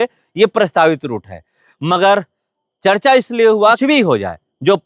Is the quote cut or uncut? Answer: cut